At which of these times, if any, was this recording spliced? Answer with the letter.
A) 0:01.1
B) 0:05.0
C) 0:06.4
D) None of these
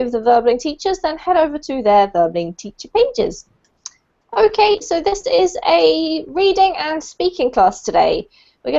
B